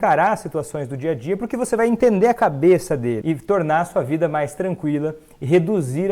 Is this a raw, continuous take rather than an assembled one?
no; 1 cut; at 3.2 s

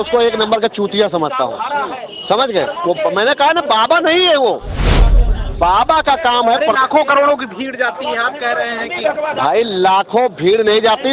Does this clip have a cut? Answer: no; 0 cuts

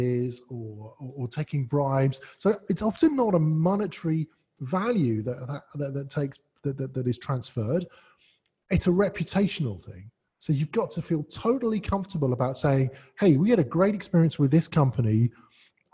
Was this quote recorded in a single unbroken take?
yes; 0 cuts

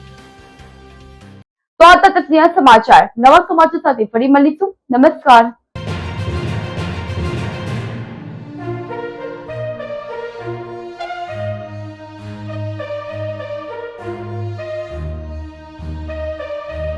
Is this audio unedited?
yes; 0 cuts

